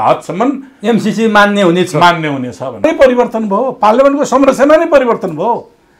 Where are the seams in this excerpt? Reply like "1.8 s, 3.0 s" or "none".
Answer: 2.8 s